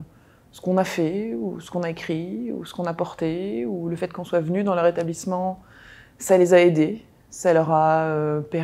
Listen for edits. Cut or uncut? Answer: uncut